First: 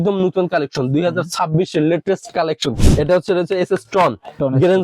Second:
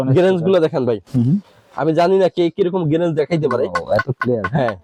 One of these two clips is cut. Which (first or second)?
first